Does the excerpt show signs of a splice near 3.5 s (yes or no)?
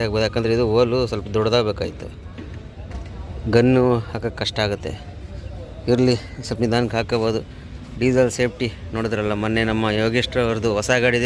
no